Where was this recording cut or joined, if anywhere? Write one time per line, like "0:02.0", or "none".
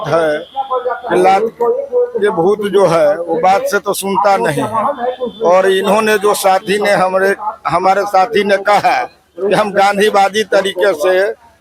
none